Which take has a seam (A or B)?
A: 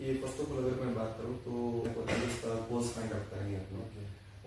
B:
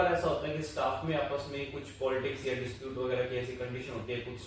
A